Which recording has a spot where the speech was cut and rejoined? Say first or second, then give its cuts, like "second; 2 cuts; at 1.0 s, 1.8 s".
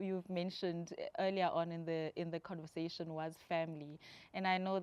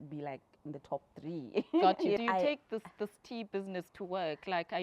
second; 1 cut; at 2.2 s